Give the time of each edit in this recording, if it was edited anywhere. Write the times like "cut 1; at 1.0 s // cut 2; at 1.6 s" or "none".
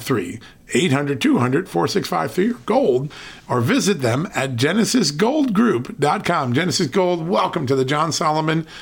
none